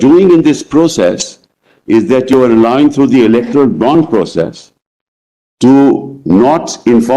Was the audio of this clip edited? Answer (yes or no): no